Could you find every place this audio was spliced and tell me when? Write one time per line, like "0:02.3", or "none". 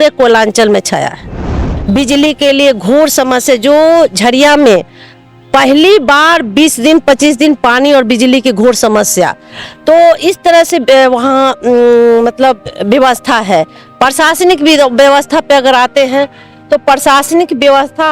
0:01.7